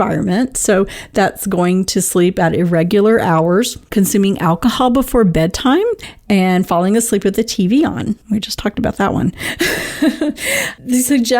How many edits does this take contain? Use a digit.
3